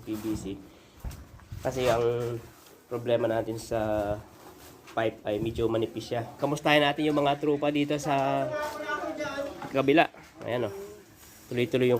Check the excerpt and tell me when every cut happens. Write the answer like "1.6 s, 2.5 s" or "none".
1.1 s, 6.3 s